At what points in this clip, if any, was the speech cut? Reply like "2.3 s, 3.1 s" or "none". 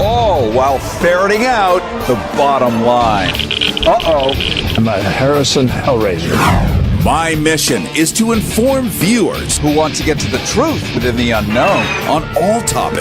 5.0 s